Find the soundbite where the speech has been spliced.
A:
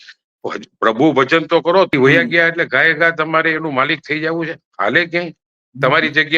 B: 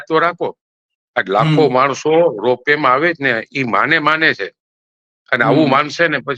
A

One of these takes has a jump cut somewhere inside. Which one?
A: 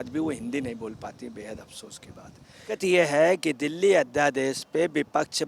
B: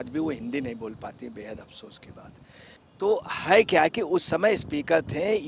A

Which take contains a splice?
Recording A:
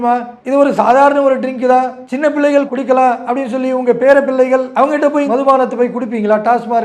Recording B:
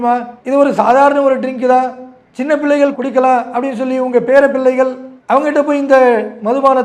A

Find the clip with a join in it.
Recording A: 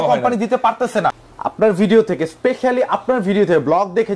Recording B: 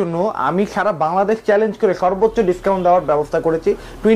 A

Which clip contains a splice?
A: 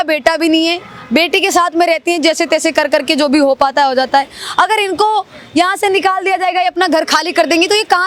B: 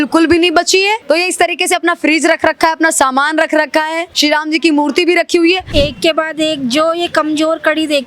B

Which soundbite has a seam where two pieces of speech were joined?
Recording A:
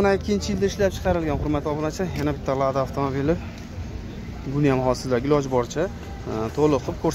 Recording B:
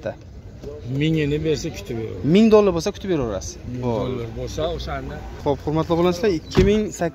B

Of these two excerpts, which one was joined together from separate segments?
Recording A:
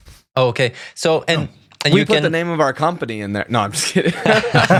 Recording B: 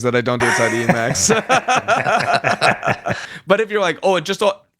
B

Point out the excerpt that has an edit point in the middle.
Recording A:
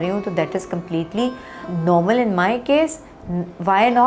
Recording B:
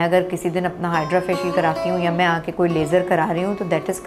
A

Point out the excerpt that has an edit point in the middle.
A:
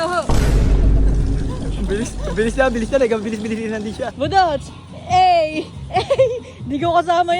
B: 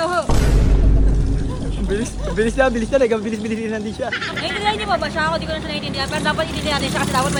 A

